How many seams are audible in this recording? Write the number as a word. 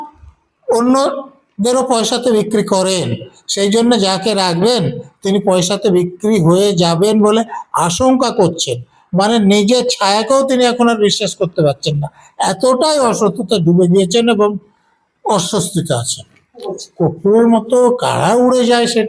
one